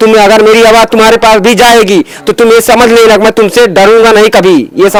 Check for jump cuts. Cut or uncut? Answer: uncut